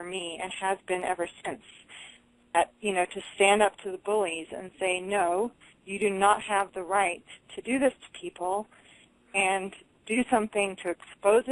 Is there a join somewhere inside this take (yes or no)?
yes